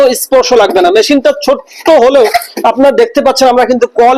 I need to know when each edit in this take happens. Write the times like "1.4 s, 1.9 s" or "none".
none

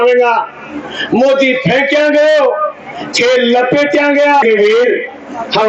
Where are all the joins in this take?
4.4 s

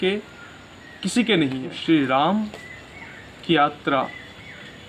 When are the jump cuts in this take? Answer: 1.8 s

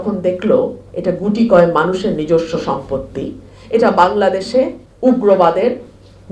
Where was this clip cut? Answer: 4.8 s

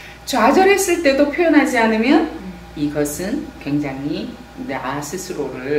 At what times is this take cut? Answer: none

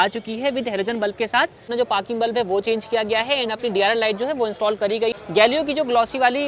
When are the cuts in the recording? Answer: 1.6 s, 5.2 s

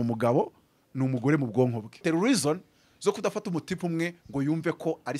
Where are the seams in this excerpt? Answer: 2.0 s

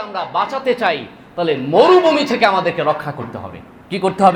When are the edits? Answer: none

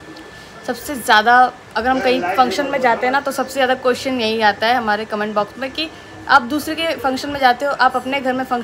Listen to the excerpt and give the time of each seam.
none

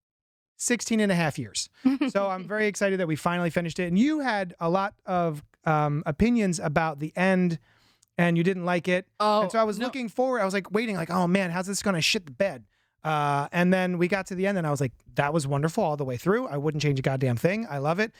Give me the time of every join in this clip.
none

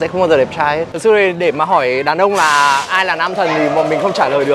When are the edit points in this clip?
0.9 s

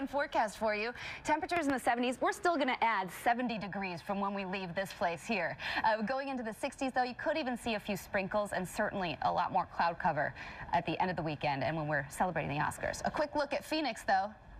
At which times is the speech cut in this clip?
3.8 s

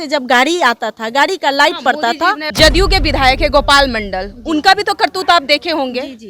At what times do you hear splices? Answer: 2.4 s

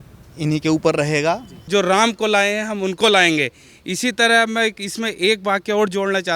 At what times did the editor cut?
1.6 s

